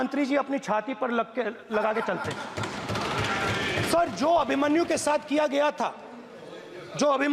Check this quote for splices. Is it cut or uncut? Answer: uncut